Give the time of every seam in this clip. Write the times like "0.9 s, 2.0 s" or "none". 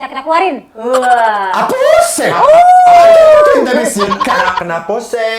none